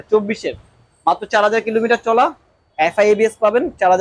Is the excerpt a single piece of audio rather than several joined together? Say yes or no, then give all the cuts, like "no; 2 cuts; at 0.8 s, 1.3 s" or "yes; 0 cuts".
yes; 0 cuts